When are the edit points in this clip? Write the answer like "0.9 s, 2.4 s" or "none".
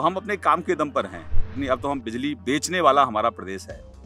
1.6 s